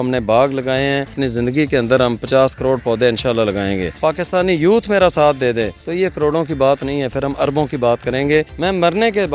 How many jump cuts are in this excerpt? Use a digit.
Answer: 4